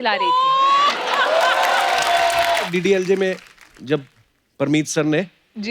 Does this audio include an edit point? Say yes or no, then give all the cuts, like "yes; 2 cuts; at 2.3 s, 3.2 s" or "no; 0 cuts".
yes; 1 cut; at 2.7 s